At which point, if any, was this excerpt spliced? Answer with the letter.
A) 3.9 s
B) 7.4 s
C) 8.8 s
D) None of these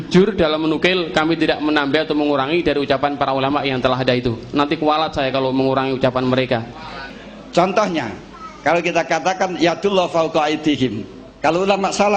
B